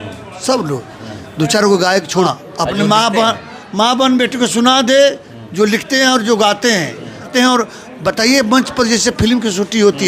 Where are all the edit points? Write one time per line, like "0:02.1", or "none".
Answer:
0:02.3
0:07.3